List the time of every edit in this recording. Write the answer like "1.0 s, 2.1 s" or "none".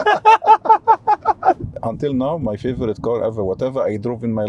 1.6 s